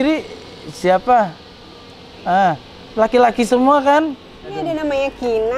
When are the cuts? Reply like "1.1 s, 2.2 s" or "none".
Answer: 4.7 s